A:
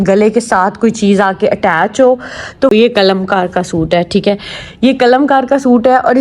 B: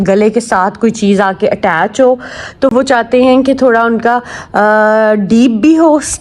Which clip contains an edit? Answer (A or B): A